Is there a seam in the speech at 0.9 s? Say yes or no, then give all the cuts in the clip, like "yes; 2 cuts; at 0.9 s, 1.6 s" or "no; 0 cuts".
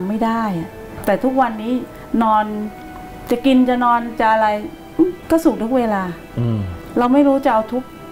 yes; 3 cuts; at 0.9 s, 5.2 s, 6.8 s